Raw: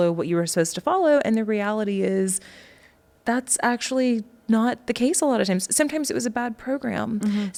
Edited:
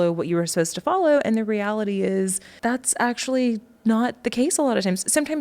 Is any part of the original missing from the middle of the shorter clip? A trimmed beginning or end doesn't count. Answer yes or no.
yes